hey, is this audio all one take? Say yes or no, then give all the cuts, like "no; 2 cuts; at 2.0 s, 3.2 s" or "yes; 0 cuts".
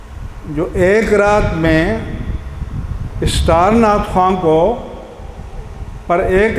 yes; 0 cuts